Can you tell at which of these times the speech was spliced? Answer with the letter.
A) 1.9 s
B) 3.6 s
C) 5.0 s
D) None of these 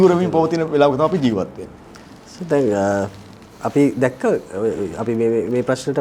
D